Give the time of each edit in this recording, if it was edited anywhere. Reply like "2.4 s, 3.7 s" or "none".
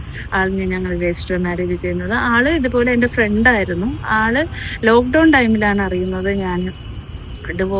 none